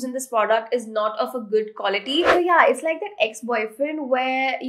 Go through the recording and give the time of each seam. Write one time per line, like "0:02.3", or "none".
0:02.3